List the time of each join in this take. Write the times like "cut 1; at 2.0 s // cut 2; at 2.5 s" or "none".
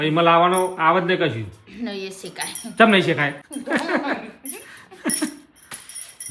cut 1; at 3.5 s